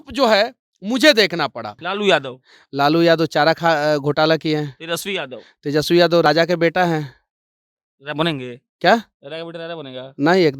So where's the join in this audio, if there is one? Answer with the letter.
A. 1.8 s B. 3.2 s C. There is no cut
A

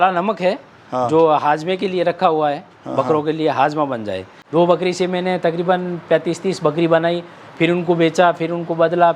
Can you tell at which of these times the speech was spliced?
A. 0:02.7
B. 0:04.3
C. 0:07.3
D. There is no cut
B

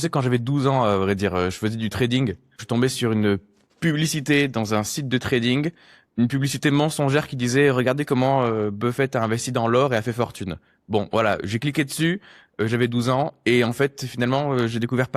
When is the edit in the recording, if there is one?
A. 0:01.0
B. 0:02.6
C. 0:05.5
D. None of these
B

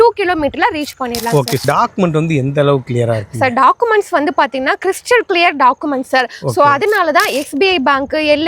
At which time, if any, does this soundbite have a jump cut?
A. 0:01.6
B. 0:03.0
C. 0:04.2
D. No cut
A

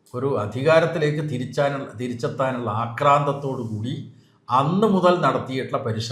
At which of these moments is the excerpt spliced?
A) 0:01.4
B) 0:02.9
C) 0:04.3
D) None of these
D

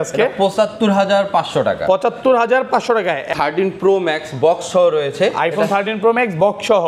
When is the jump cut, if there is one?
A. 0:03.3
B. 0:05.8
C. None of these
A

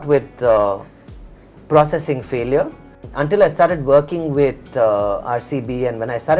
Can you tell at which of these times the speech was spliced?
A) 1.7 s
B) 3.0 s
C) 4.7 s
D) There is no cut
B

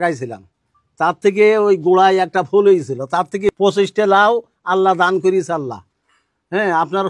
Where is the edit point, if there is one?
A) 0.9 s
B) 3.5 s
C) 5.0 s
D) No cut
B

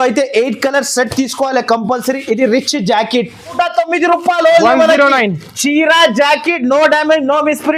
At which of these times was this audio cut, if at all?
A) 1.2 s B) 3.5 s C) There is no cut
B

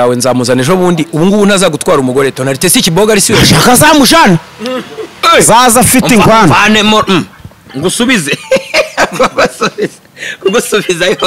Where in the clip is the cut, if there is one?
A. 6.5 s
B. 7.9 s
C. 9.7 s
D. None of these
D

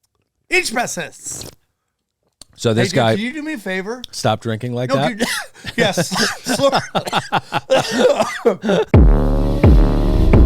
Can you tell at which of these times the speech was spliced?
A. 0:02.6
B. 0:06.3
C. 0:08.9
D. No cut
C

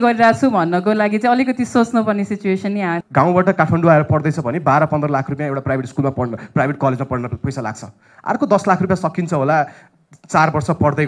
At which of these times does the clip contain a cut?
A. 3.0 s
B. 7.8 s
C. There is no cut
A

